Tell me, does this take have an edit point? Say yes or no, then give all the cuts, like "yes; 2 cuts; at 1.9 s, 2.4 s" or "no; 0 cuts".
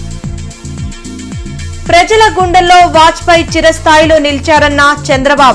no; 0 cuts